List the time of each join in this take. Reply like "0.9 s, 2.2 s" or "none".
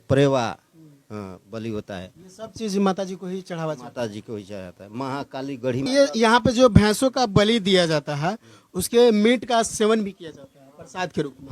5.9 s